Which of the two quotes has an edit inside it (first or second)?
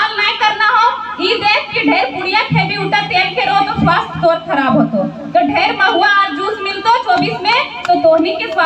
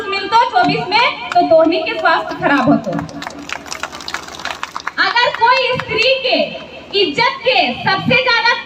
second